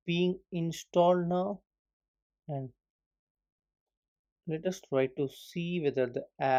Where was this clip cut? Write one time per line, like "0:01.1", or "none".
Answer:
none